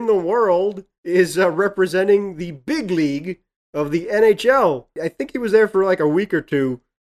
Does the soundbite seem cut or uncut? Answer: uncut